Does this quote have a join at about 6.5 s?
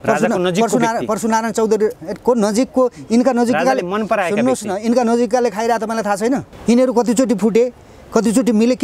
yes; 1 cut; at 6.5 s

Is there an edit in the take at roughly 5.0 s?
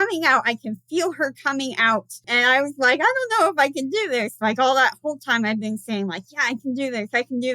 no; 1 cut; at 2.3 s

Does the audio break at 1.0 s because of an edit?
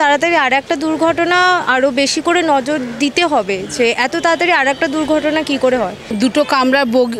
no; 1 cut; at 6.1 s

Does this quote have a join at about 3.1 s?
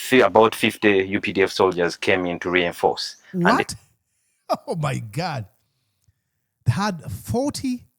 yes; 1 cut; at 3.1 s

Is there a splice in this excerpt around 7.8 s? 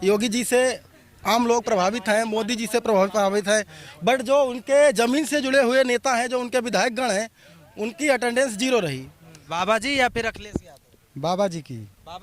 no; 1 cut; at 9.5 s

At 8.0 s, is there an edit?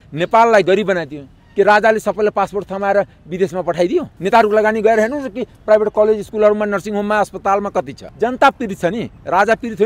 yes; 2 cuts; at 4.1 s, 8.0 s

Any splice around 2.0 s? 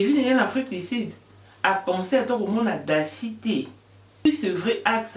no; 1 cut; at 4.2 s

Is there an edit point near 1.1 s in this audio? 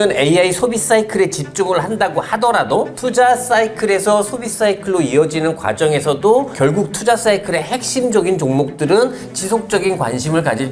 no; 0 cuts

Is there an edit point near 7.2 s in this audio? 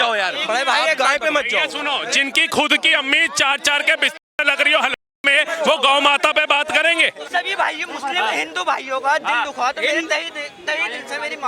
yes; 1 cut; at 7.2 s

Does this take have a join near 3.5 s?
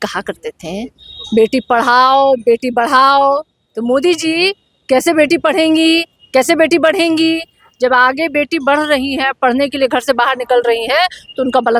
no; 0 cuts

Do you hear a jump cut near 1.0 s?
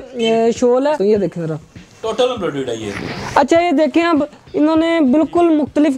yes; 1 cut; at 1.0 s

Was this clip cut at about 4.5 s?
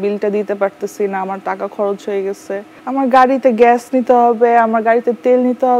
no; 0 cuts

